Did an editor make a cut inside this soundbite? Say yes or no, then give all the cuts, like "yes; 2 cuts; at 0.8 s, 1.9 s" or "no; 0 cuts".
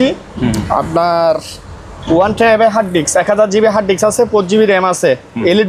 no; 0 cuts